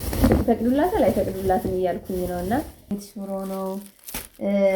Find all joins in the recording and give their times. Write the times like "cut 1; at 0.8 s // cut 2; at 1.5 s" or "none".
cut 1; at 2.9 s